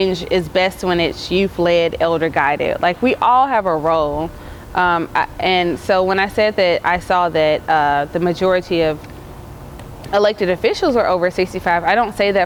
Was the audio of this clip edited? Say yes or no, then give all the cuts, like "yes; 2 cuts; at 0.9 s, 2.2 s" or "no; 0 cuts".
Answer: no; 0 cuts